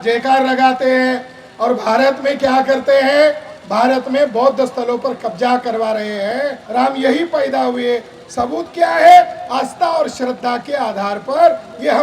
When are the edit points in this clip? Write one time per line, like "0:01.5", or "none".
0:06.6